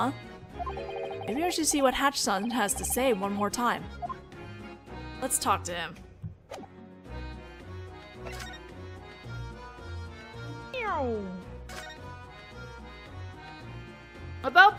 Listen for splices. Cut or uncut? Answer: uncut